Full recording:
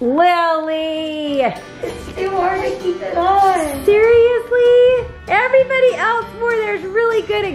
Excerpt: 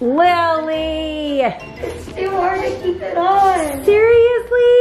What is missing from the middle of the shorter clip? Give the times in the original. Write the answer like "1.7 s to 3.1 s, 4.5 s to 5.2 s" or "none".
none